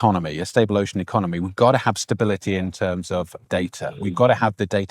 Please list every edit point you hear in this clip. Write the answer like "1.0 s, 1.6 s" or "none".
3.4 s